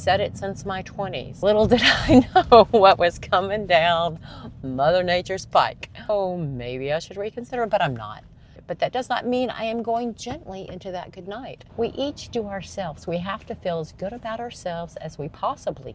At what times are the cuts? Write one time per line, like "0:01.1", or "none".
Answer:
0:01.2
0:06.1
0:08.6
0:11.6